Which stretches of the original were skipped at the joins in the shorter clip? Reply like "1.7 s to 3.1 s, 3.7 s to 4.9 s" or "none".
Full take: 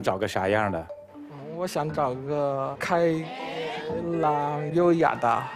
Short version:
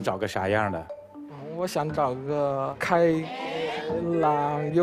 none